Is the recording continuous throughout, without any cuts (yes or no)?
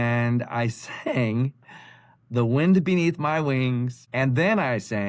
no